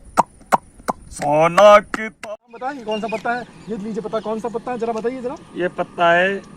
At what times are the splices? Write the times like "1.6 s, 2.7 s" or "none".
2.1 s